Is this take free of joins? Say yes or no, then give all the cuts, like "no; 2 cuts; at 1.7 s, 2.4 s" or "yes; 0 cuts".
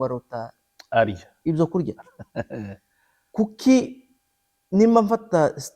yes; 0 cuts